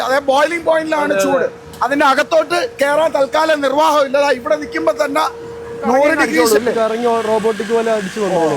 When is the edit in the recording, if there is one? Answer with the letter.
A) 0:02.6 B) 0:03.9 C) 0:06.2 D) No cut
C